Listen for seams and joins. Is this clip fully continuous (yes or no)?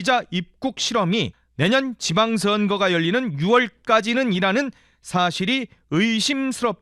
no